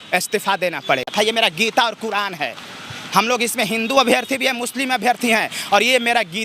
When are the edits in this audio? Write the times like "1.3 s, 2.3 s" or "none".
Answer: 1.1 s